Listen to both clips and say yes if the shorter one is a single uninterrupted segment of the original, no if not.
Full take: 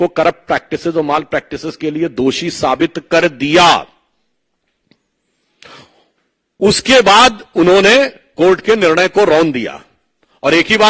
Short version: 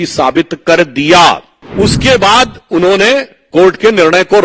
no